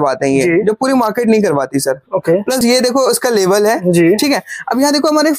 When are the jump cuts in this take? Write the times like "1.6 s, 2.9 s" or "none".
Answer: 2.6 s